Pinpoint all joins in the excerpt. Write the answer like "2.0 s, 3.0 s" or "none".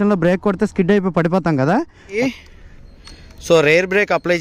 2.2 s